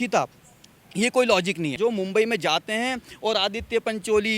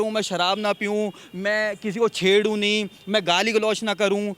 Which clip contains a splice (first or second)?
first